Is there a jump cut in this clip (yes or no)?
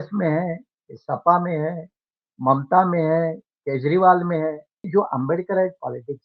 yes